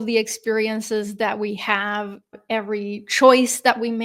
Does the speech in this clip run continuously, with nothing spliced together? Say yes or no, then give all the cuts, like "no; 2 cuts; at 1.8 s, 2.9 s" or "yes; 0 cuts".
no; 1 cut; at 2.3 s